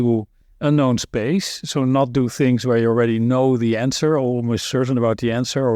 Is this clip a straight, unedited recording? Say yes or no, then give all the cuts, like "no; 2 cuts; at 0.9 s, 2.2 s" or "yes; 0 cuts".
yes; 0 cuts